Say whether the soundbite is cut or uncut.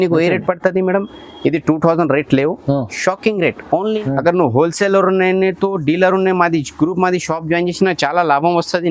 cut